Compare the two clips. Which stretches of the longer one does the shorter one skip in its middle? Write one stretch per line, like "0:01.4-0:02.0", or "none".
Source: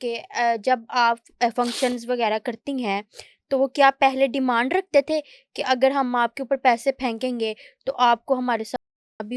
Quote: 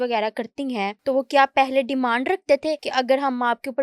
0:03.0-0:03.4
0:05.3-0:05.6